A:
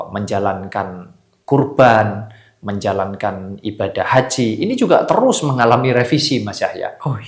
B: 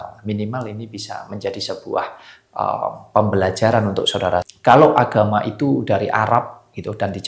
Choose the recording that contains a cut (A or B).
B